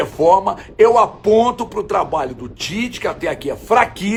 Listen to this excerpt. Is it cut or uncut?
uncut